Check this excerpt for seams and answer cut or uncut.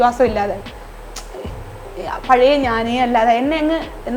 uncut